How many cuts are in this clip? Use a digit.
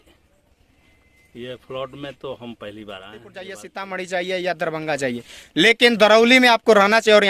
1